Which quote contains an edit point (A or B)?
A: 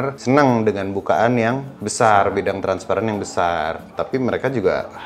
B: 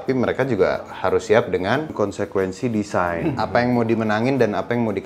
B